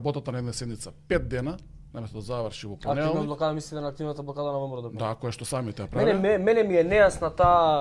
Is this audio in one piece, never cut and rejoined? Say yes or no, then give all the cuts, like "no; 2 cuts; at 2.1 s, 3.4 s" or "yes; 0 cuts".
yes; 0 cuts